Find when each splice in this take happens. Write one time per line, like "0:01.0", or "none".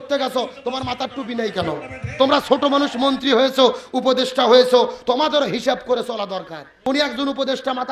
0:02.0
0:06.6